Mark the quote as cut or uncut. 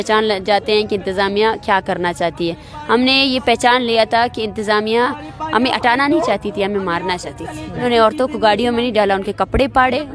cut